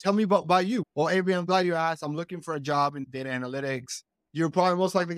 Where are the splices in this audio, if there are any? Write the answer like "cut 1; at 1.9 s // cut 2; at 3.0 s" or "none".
cut 1; at 0.9 s // cut 2; at 3.1 s // cut 3; at 4.2 s